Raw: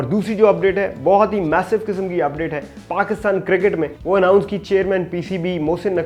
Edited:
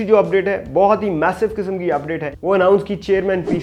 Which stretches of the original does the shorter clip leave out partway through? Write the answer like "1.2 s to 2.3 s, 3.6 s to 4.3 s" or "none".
2.7 s to 4.0 s